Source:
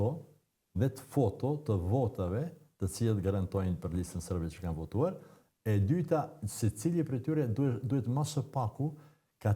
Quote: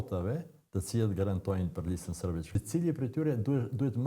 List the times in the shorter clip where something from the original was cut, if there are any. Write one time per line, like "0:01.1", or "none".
0:02.6